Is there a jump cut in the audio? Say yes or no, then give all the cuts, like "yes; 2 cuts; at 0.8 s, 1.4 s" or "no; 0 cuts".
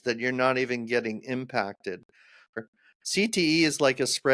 yes; 1 cut; at 2.6 s